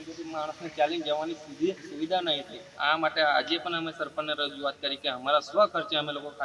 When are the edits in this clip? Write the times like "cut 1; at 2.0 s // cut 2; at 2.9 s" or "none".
cut 1; at 2.7 s

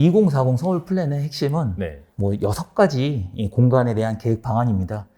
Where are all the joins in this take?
cut 1; at 2.0 s

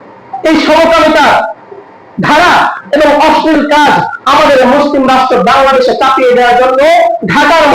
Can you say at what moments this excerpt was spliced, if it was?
none

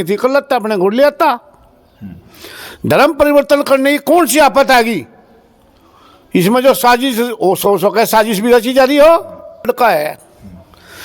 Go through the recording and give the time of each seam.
cut 1; at 9.7 s

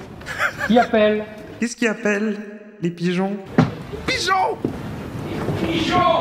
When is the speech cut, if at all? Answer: cut 1; at 1.4 s // cut 2; at 3.4 s

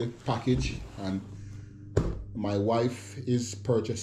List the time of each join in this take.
none

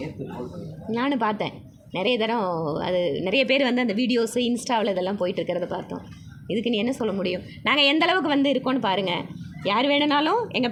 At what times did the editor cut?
none

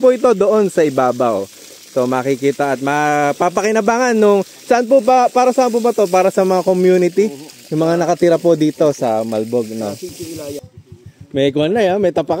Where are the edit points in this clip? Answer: cut 1; at 10.8 s

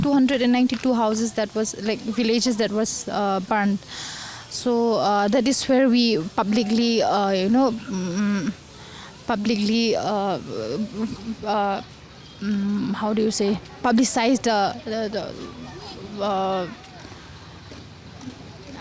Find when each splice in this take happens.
none

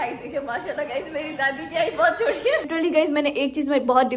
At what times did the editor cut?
cut 1; at 2.7 s

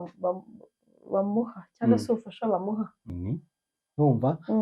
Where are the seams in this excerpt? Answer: cut 1; at 3.2 s

